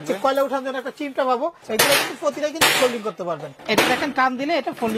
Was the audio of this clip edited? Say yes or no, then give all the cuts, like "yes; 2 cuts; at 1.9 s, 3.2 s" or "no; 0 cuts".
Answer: yes; 2 cuts; at 1.6 s, 3.5 s